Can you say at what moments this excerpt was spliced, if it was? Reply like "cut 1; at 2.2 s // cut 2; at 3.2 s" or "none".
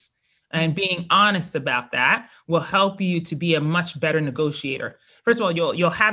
cut 1; at 5.1 s